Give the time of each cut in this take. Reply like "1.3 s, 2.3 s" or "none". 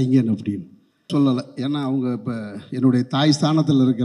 1.1 s